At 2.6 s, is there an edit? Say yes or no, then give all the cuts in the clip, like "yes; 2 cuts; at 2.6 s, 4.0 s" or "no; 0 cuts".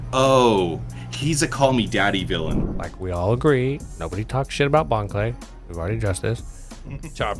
yes; 1 cut; at 2.6 s